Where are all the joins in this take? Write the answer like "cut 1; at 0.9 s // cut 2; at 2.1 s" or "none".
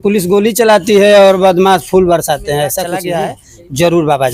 cut 1; at 3.0 s